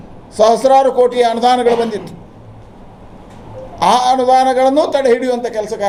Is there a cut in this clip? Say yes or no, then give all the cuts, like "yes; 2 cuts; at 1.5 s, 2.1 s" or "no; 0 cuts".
no; 0 cuts